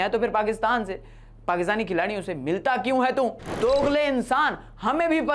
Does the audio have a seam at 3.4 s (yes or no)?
yes